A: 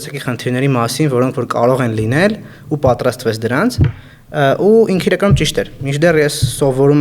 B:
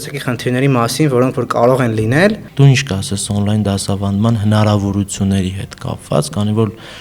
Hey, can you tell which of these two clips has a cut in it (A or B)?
B